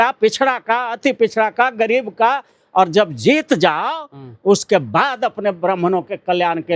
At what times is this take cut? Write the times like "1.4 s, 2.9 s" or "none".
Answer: none

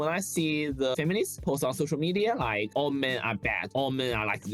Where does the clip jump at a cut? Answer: 0.9 s

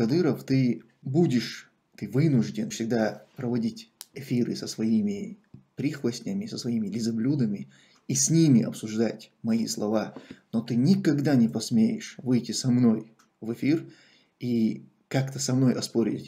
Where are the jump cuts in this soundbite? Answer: 1.0 s, 2.7 s

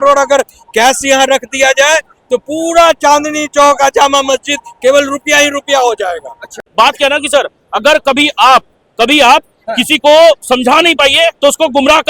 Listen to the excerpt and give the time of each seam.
6.6 s

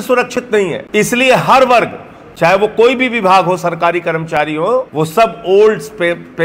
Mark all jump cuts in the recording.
0.8 s, 4.9 s

